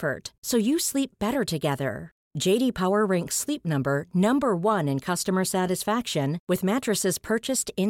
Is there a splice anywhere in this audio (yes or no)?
no